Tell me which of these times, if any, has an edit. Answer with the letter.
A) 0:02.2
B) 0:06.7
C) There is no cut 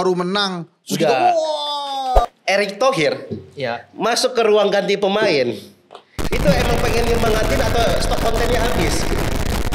A